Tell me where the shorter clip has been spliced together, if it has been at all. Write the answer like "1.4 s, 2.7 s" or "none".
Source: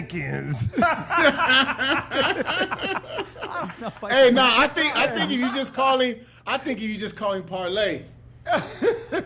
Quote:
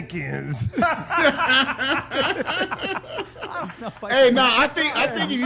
none